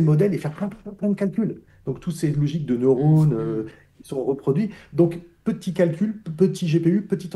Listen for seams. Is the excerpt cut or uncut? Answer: uncut